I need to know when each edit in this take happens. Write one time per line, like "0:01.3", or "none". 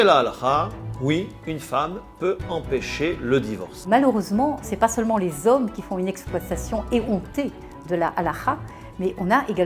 none